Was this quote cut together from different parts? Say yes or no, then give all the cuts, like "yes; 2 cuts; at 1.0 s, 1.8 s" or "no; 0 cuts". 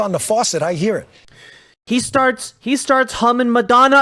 no; 0 cuts